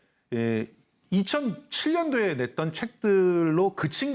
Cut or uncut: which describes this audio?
cut